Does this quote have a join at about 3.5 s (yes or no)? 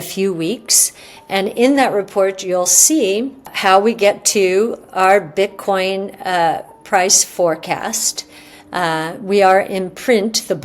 yes